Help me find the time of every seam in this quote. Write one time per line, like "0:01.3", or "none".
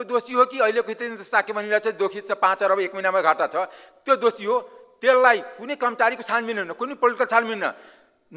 none